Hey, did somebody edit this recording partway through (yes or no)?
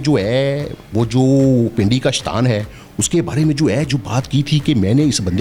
no